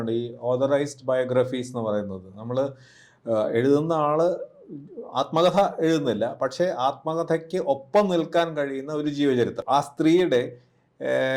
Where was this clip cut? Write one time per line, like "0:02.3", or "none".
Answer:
0:09.6

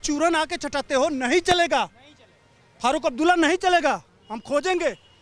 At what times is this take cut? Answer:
none

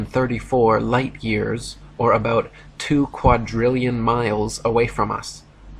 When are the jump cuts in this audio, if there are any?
none

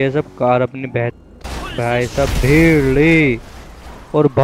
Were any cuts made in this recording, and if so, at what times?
0:01.1

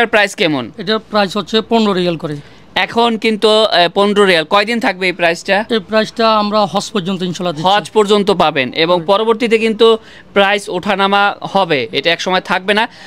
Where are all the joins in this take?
none

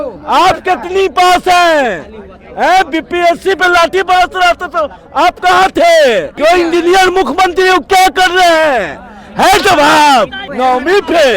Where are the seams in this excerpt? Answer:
0:06.3
0:10.4

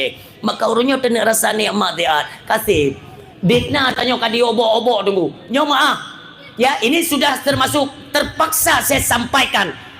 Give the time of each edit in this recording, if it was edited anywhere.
none

